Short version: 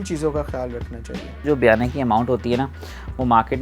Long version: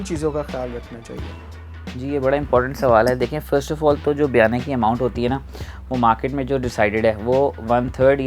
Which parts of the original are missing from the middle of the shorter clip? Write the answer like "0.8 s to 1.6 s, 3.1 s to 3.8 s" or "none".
1.4 s to 4.2 s